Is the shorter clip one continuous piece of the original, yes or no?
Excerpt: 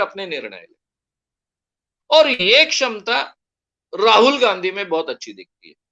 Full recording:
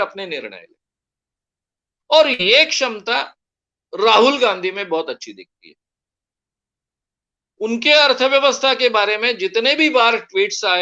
yes